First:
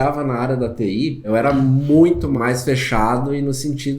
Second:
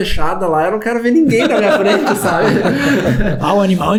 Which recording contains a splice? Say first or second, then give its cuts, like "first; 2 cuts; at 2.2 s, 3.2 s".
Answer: first; 2 cuts; at 1.2 s, 2.4 s